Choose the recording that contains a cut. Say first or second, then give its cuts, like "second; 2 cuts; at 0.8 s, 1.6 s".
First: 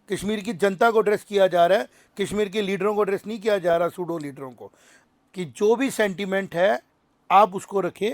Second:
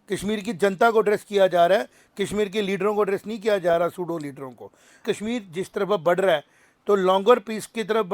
second; 1 cut; at 5.0 s